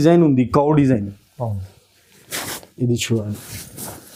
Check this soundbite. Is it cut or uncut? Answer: uncut